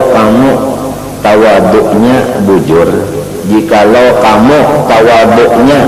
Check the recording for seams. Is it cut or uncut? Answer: uncut